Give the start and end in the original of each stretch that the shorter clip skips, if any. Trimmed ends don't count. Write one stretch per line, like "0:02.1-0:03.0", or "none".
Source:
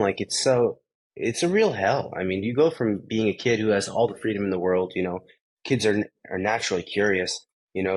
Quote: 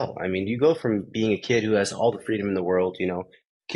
none

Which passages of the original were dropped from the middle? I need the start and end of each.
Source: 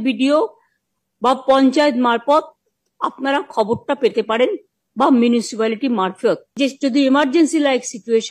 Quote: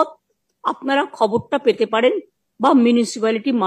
none

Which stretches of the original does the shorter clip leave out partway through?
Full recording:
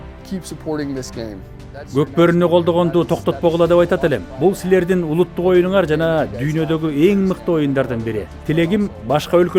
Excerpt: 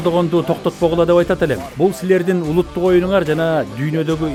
none

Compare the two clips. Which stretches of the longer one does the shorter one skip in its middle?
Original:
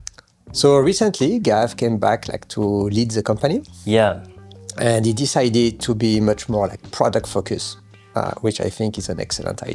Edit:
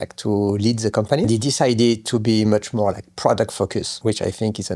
0:03.6-0:05.0
0:07.7-0:08.3

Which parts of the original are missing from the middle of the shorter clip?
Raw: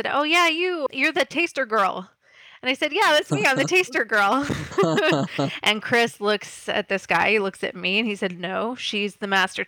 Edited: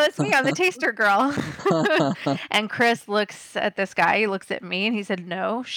none

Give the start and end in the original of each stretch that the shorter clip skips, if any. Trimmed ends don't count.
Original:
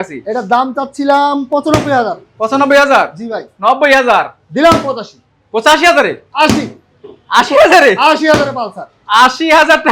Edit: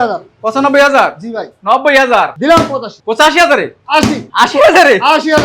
0:04.5-0:05.0
0:06.7-0:07.2

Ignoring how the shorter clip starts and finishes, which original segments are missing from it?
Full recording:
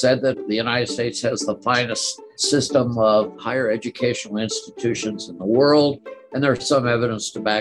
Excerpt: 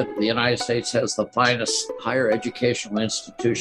0:02.3-0:03.4

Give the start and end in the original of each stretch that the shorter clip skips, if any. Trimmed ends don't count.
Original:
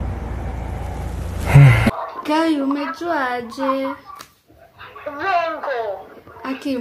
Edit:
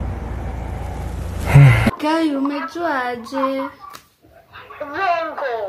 0:02.0-0:02.2

